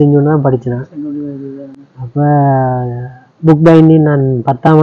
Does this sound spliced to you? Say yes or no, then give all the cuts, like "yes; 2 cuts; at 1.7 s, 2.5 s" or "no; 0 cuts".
no; 0 cuts